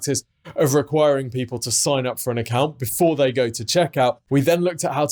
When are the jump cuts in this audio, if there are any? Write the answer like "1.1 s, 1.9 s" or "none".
4.2 s